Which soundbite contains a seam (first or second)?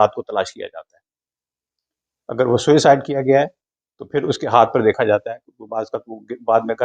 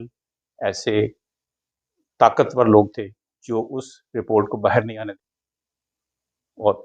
second